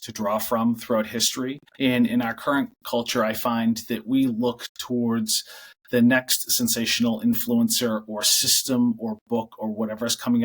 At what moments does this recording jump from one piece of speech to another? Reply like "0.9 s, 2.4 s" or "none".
1.6 s